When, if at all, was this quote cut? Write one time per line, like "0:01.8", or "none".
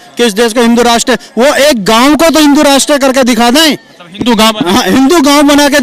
none